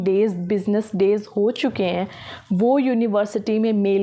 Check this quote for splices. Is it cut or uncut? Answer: uncut